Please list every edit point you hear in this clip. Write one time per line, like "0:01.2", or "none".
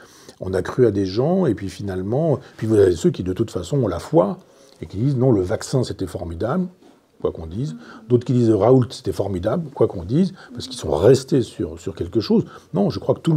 none